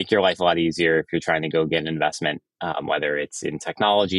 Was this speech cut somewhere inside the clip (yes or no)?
no